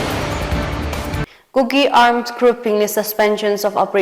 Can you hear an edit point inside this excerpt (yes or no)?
yes